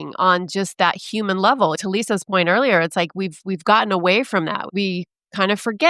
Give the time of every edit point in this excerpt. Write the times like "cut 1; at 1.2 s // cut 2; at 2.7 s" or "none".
cut 1; at 1.8 s // cut 2; at 4.6 s